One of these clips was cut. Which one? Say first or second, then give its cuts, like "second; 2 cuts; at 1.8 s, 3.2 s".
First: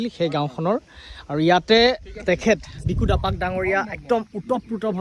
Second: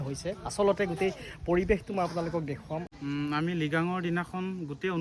second; 1 cut; at 2.9 s